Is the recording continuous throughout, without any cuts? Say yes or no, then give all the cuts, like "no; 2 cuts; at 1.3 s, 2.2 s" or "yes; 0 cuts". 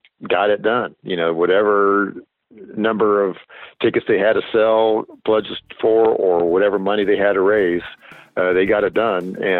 yes; 0 cuts